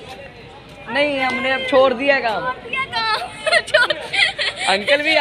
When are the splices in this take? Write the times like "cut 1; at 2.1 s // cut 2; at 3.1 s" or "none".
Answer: none